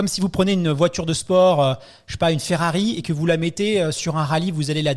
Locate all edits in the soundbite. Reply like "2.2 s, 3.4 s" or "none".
none